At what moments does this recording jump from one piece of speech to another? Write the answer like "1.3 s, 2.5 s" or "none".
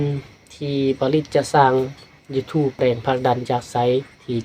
2.8 s